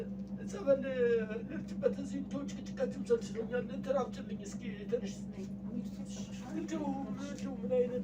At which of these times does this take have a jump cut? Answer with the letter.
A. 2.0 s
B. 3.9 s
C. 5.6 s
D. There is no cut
D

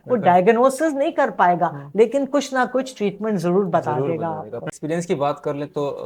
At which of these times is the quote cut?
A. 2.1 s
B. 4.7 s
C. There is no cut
B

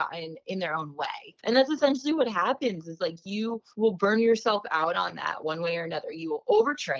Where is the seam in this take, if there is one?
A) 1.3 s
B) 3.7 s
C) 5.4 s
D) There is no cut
A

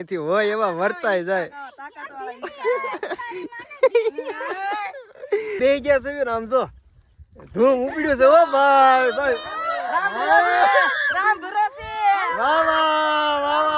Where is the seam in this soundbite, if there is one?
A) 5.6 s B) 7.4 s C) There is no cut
A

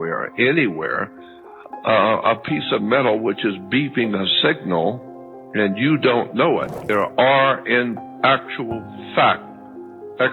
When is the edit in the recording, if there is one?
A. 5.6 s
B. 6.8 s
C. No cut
B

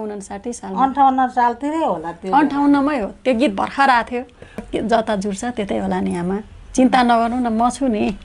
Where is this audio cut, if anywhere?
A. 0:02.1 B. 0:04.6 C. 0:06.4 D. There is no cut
B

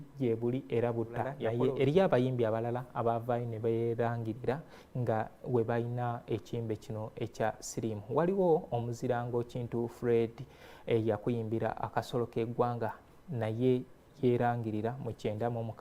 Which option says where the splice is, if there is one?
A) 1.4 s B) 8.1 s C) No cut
A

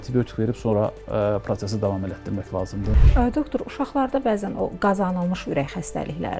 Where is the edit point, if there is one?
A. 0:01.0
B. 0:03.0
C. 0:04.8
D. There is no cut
B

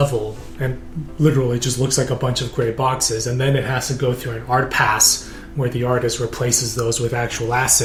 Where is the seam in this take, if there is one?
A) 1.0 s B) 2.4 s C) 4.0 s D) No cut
D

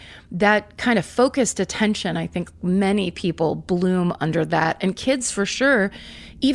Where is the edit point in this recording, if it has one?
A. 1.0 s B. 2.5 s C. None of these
C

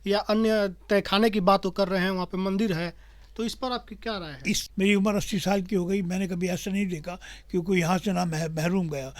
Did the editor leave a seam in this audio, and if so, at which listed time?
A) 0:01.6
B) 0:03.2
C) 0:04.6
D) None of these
C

